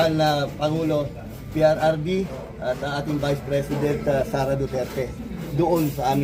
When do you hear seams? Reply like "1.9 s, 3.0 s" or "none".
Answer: none